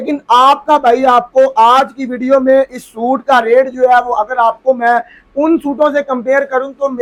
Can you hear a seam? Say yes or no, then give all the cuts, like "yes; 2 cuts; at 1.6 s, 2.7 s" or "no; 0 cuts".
no; 0 cuts